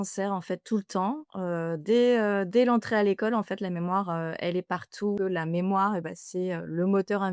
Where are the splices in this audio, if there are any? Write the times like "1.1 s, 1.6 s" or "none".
5.2 s